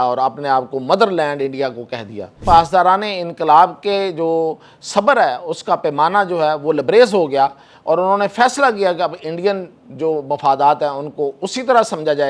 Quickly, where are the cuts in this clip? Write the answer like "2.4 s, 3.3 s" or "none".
2.4 s